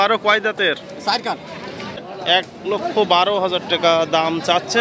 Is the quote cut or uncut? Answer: cut